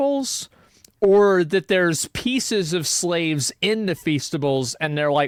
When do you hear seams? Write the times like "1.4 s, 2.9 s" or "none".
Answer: none